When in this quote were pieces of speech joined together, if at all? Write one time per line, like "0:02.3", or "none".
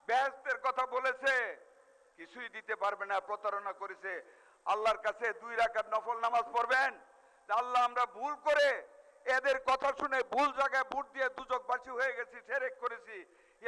none